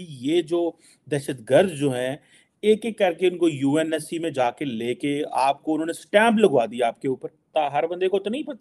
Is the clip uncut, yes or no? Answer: yes